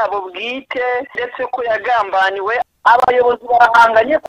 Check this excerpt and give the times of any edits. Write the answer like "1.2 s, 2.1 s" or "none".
1.2 s, 2.6 s